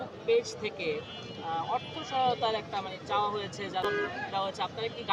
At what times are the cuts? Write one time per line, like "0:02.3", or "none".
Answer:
0:03.8